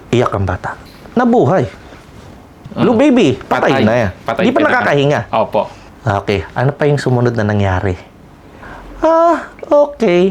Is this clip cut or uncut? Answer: cut